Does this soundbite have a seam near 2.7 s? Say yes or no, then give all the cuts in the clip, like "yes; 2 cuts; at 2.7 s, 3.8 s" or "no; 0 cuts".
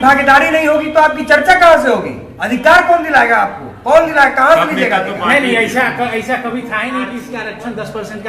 no; 1 cut; at 7.3 s